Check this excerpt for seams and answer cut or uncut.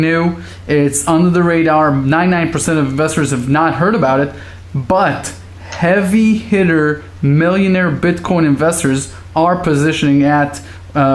cut